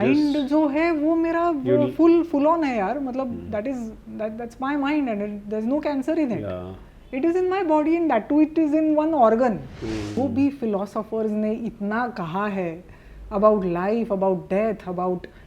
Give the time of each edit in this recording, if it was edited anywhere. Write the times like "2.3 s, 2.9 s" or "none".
10.2 s